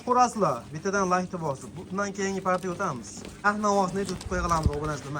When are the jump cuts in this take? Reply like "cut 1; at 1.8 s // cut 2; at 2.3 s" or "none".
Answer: cut 1; at 3.3 s